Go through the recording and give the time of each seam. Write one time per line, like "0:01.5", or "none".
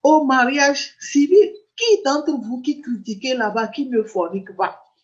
0:01.7

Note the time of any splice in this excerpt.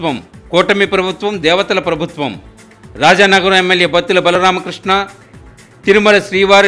none

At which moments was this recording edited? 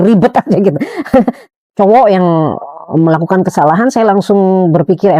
0:01.4

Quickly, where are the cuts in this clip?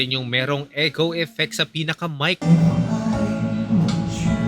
0:02.4

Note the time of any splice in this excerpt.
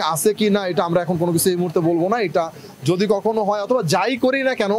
none

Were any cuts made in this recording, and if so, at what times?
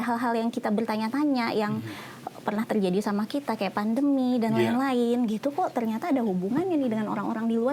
none

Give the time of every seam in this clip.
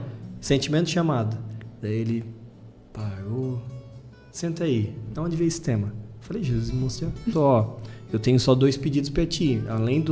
0:07.3

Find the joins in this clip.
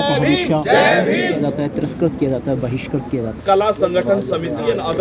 0:03.4

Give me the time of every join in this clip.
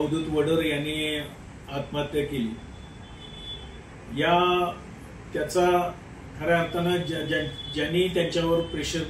none

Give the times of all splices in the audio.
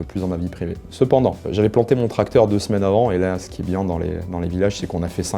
0:01.4

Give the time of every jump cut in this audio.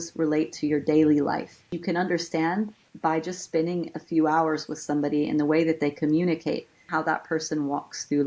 0:01.7
0:06.9

